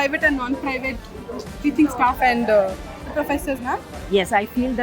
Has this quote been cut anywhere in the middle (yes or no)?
no